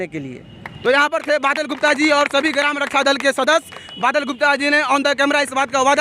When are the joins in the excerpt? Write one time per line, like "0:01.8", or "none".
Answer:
none